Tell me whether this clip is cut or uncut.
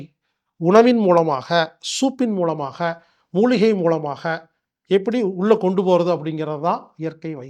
uncut